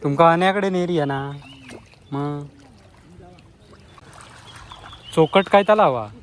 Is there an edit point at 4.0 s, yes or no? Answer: yes